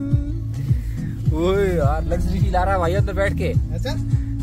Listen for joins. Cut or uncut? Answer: uncut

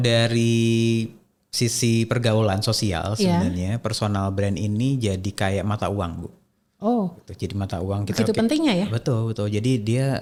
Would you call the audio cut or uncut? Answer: uncut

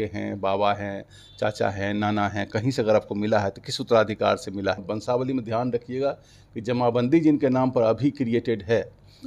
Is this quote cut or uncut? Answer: cut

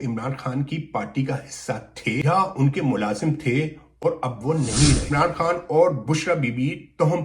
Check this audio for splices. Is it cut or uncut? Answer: cut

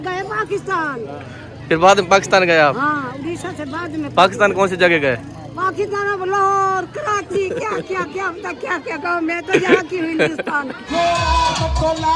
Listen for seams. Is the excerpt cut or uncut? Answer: uncut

